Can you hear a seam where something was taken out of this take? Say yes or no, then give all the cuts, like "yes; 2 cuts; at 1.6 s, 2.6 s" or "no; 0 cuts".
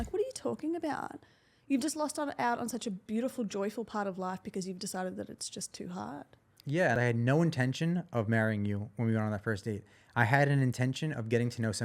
yes; 1 cut; at 6.9 s